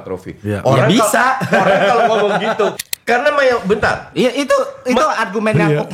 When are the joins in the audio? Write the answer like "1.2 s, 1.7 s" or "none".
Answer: 2.9 s